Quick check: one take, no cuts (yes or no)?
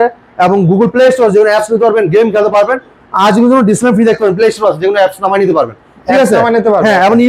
yes